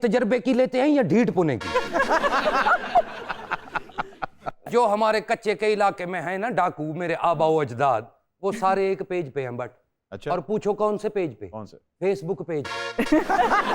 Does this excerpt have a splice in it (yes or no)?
yes